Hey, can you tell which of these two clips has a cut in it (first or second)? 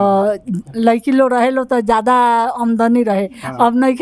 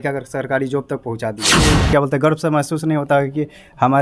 second